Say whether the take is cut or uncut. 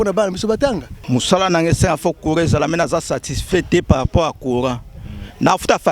cut